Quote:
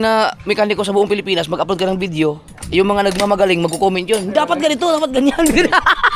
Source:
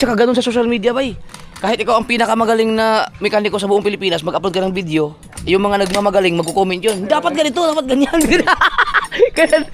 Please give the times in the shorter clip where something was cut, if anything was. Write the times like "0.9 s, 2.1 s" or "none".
none

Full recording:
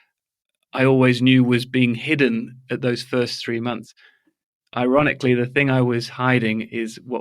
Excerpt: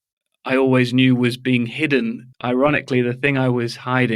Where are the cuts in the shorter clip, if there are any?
2.3 s

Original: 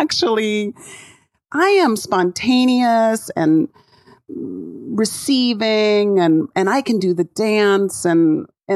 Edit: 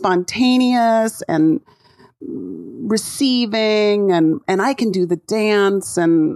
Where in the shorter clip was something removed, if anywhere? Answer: none

